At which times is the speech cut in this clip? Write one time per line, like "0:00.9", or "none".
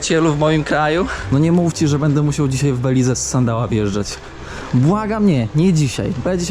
0:01.2